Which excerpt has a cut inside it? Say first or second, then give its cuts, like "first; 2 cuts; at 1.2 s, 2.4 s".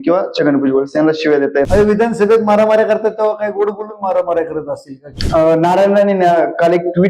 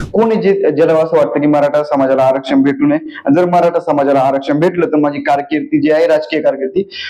first; 2 cuts; at 1.7 s, 5.0 s